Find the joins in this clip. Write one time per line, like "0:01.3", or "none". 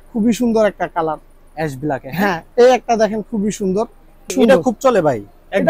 0:02.4
0:04.3